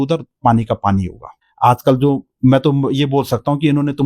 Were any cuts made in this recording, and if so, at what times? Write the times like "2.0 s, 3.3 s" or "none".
1.4 s